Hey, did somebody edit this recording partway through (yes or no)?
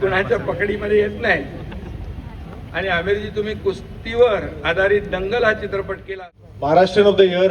yes